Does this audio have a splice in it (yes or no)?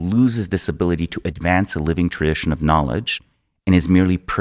no